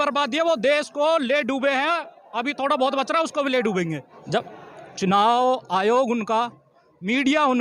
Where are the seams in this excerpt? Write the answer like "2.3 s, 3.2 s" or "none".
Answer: 4.1 s